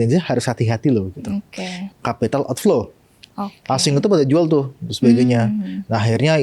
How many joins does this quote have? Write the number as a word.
one